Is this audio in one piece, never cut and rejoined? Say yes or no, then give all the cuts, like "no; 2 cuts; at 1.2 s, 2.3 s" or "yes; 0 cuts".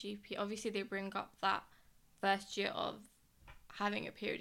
yes; 0 cuts